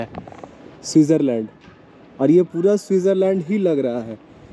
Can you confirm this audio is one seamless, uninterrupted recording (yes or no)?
yes